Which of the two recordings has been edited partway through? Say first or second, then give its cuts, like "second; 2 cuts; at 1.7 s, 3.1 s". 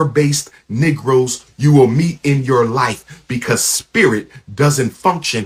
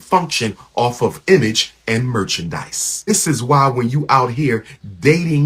second; 1 cut; at 3.1 s